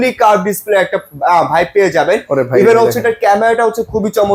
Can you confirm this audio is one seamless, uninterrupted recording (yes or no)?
yes